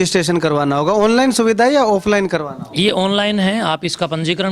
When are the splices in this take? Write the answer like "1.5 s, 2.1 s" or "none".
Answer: none